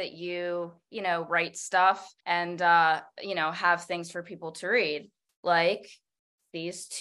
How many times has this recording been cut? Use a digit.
2